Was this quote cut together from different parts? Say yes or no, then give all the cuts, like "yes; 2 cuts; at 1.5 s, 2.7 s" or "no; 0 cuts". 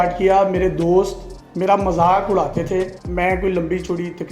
yes; 1 cut; at 3.0 s